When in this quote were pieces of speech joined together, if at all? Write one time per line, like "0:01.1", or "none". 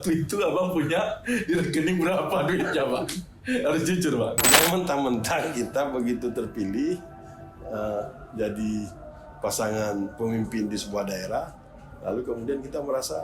0:04.4